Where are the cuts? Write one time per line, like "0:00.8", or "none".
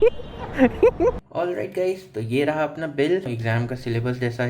0:01.2
0:03.3